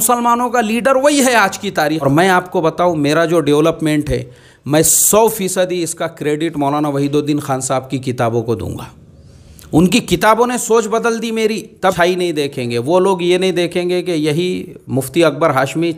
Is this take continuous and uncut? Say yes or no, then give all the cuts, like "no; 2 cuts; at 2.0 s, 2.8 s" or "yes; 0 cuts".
no; 2 cuts; at 2.0 s, 12.0 s